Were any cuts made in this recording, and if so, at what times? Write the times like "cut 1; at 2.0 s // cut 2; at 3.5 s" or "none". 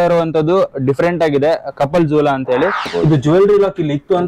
cut 1; at 2.9 s